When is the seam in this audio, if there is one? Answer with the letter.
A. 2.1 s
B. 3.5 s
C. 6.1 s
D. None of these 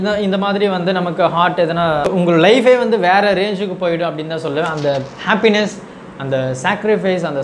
A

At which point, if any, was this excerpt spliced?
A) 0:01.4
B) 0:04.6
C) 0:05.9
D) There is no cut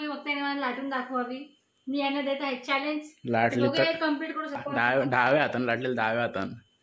B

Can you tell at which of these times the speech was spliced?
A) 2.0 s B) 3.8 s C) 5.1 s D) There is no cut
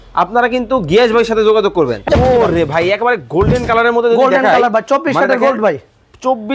A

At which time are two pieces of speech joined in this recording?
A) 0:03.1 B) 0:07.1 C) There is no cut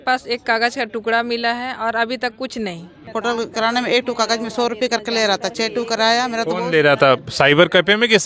A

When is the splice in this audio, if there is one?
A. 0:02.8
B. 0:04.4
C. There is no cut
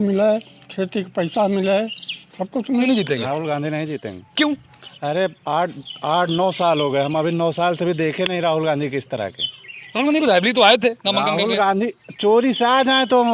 A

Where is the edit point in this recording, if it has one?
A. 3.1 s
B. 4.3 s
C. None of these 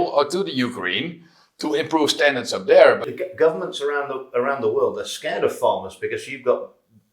A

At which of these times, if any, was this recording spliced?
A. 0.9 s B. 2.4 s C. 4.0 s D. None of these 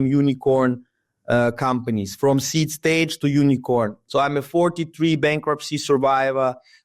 C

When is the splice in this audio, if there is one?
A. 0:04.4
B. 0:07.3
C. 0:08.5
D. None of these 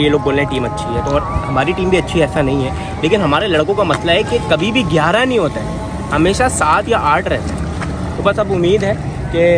D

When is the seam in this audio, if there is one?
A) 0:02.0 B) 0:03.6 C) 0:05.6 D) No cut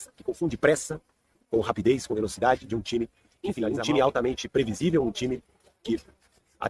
B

